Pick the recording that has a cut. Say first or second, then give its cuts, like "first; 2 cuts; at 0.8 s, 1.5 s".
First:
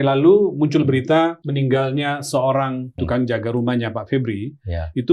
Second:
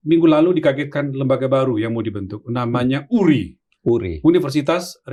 first; 2 cuts; at 1.4 s, 3.0 s